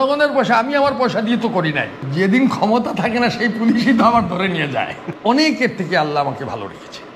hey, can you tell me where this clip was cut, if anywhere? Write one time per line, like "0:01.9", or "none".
0:02.1
0:05.0

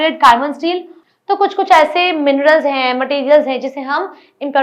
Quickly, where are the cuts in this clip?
0:00.9

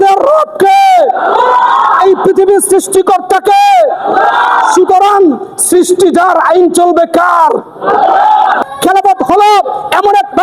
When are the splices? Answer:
0:08.6

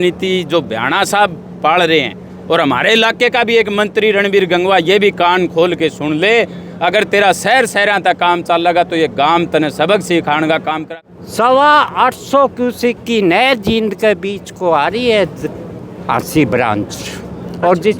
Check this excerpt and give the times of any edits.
0:10.8

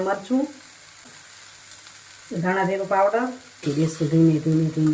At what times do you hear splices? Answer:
0:01.1
0:03.7

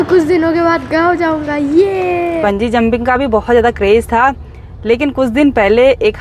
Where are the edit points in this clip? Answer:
0:02.4

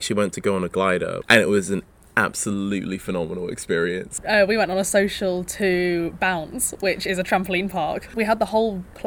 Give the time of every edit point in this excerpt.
0:01.2
0:04.1
0:08.1

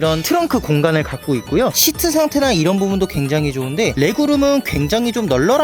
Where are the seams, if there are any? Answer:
0:01.8

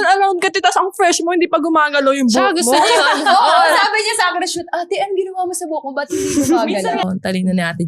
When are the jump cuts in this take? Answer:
0:06.7

